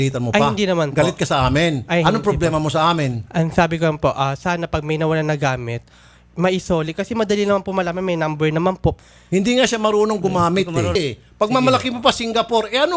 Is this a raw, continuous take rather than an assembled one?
no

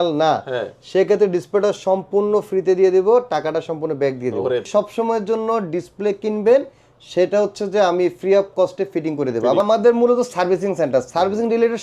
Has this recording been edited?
yes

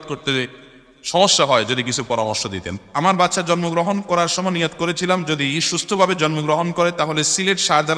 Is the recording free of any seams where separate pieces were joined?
no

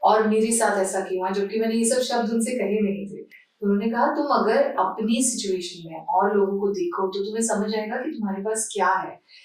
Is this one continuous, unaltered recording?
yes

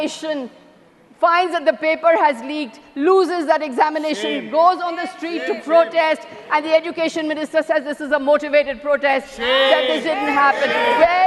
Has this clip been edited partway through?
no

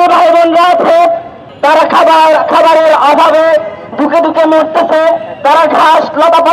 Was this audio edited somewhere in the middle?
no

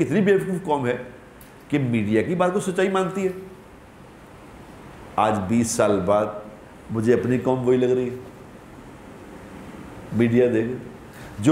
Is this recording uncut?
yes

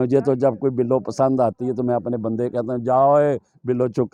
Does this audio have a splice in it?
no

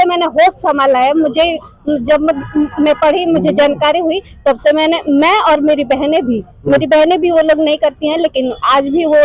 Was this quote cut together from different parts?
no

